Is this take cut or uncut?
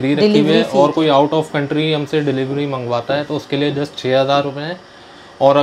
uncut